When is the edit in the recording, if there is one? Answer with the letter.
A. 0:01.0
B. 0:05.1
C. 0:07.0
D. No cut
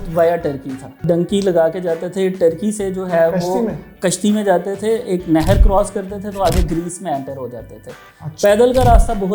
A